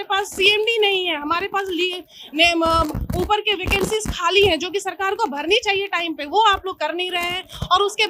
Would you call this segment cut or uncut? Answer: uncut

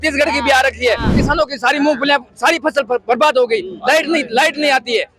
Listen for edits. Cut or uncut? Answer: cut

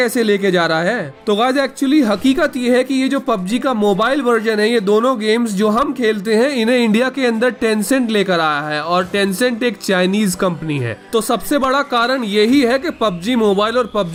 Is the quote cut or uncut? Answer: uncut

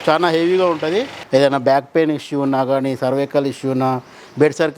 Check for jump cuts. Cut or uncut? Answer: cut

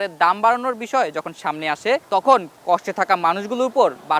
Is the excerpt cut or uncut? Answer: cut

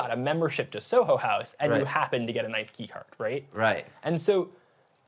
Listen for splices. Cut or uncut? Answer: uncut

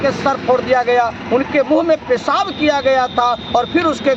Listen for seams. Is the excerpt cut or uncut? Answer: uncut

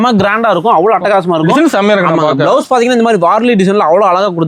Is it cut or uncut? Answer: uncut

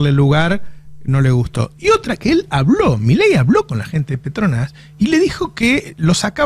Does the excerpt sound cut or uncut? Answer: uncut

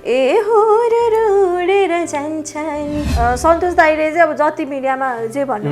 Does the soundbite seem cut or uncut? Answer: cut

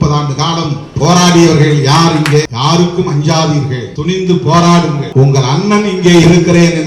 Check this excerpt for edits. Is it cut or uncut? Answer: cut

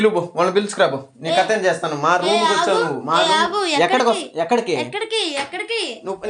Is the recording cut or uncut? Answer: uncut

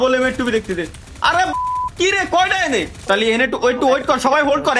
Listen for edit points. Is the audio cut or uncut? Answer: cut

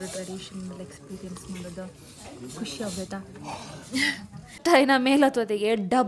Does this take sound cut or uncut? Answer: cut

